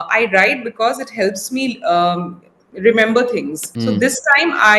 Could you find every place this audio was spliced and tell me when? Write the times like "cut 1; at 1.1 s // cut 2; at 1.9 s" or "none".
cut 1; at 3.6 s